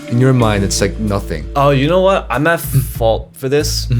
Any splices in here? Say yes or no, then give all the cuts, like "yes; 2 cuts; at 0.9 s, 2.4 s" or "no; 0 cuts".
yes; 1 cut; at 1.4 s